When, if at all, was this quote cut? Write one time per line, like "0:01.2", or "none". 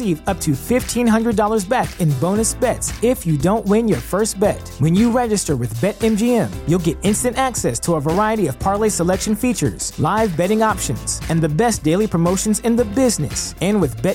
none